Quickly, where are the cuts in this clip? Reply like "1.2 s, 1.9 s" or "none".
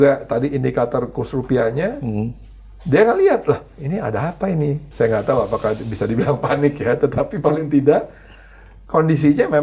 4.8 s